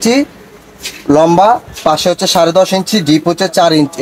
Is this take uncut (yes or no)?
yes